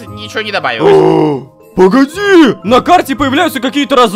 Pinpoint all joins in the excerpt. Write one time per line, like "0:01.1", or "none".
0:02.6